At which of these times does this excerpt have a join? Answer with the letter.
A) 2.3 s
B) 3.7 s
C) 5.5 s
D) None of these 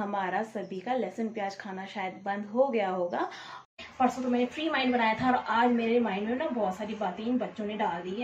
B